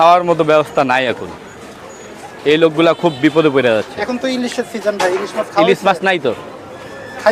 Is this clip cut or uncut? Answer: uncut